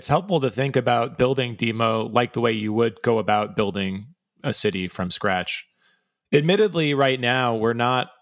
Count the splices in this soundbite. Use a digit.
0